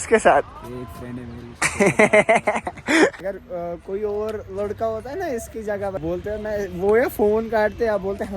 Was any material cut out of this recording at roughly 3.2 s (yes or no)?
yes